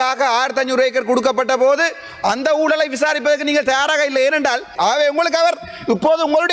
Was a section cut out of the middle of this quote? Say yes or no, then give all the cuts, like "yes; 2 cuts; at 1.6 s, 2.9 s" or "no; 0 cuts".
yes; 1 cut; at 4.7 s